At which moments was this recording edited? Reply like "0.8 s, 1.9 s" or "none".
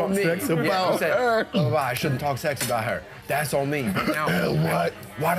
1.5 s